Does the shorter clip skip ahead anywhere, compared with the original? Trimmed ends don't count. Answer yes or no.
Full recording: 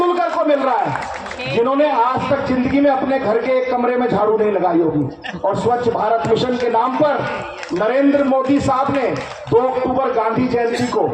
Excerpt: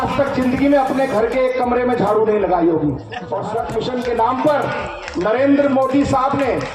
yes